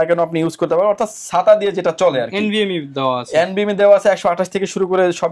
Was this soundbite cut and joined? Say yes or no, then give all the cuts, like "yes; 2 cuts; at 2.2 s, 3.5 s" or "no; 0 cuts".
no; 0 cuts